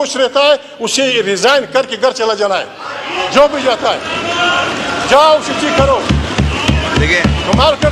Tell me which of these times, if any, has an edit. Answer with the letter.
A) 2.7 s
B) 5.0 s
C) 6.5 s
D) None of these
D